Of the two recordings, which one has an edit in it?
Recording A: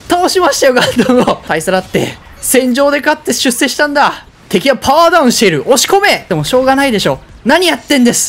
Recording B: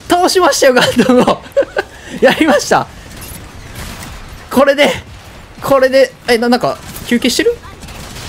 A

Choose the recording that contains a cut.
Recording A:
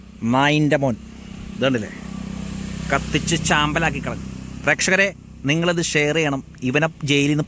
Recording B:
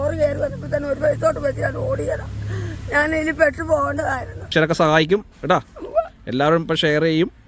B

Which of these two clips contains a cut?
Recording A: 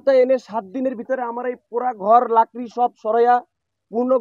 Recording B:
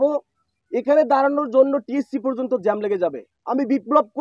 B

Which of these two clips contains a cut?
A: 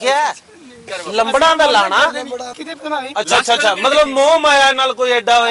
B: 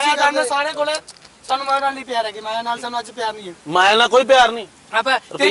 A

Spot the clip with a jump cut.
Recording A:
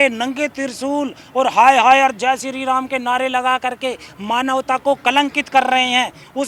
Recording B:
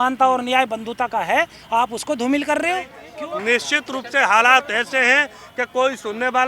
B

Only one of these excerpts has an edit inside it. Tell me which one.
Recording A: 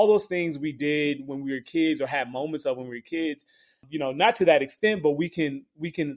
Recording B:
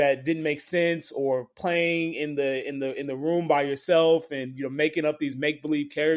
A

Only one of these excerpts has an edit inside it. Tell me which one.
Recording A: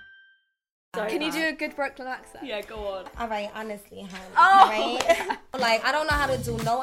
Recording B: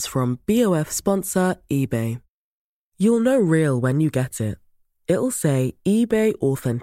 A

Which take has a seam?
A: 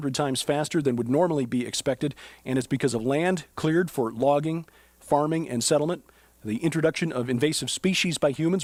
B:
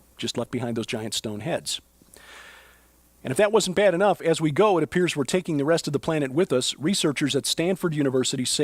B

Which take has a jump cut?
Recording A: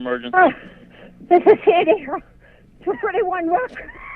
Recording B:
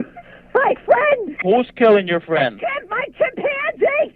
B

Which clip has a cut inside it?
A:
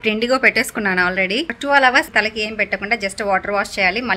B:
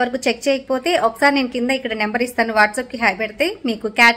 A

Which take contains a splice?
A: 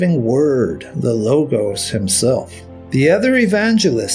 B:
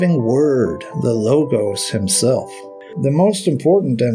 B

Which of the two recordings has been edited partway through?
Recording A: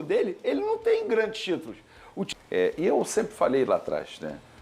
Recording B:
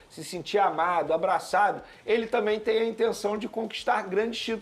A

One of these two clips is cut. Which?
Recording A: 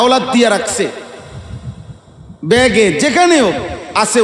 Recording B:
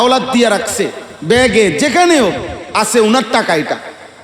B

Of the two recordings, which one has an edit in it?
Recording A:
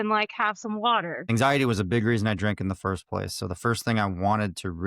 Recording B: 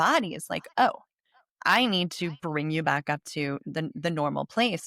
A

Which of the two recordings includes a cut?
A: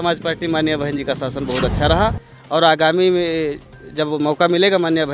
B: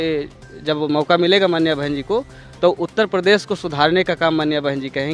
A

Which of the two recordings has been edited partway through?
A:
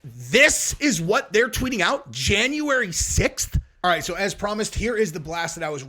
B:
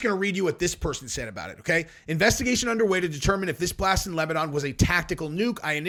A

